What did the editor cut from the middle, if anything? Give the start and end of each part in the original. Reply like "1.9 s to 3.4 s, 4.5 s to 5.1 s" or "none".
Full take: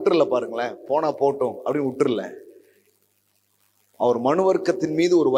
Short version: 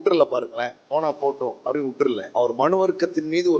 2.2 s to 3.9 s

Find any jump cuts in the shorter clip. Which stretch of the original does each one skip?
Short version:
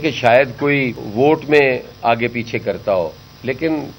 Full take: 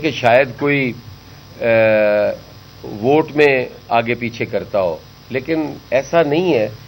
1.0 s to 2.9 s

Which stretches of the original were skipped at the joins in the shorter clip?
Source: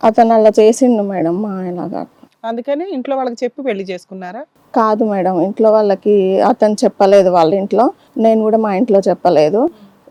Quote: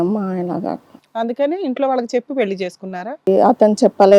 4.5 s to 6.3 s

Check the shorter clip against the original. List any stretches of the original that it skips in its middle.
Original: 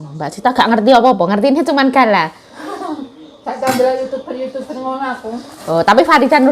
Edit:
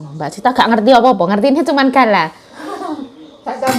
none

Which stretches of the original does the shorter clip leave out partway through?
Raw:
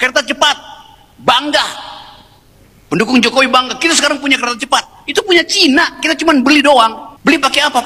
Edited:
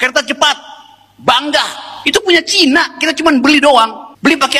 1.9 s to 5.0 s

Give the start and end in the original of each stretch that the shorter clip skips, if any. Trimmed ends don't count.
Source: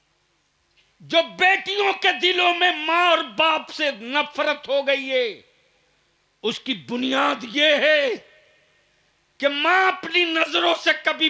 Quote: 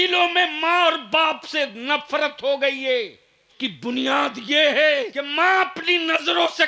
5.8 s to 6.6 s, 8.3 s to 9.5 s

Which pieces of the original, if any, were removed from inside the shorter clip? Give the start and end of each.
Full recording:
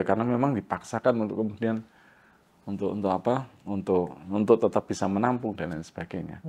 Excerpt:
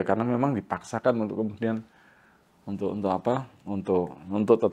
none

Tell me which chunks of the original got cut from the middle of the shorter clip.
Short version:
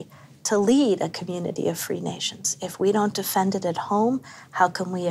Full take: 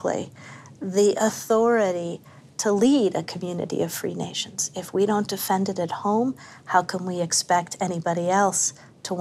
none

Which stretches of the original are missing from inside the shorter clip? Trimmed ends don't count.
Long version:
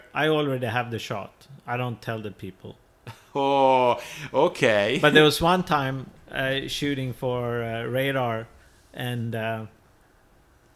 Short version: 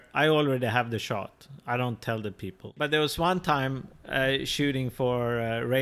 2.8 s to 5.0 s

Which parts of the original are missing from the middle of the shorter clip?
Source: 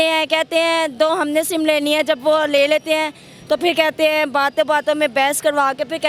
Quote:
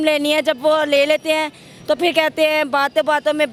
none

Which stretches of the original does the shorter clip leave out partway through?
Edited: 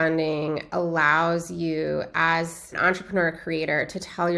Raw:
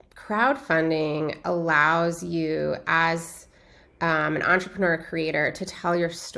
3.5 s to 4.4 s

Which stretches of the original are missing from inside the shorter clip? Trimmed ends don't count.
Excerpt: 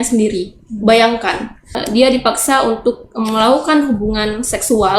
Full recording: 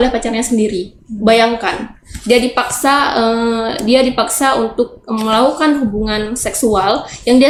2.1 s to 3.7 s

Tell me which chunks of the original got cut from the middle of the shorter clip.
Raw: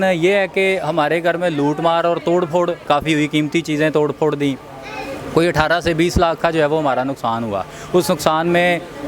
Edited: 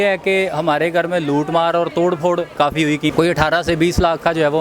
3.4 s to 5.3 s

